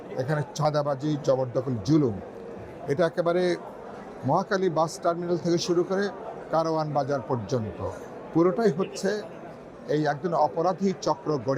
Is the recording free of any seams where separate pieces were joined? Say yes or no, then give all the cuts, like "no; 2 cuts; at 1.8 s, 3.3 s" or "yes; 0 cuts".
yes; 0 cuts